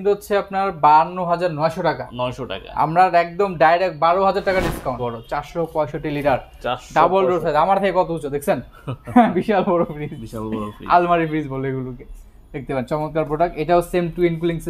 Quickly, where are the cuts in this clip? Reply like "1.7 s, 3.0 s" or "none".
5.0 s